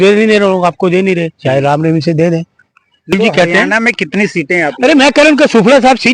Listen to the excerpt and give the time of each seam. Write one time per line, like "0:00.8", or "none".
0:03.1